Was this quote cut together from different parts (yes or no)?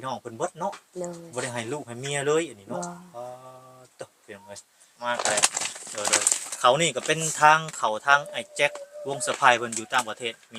yes